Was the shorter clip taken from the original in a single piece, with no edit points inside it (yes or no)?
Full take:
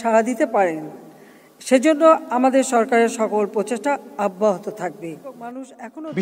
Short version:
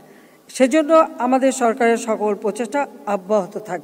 yes